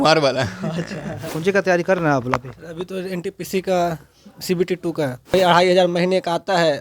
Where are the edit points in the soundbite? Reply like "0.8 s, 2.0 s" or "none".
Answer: 1.3 s, 5.3 s